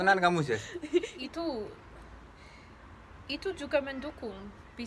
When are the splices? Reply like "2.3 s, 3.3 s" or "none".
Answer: 1.2 s